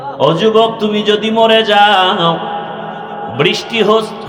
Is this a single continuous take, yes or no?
yes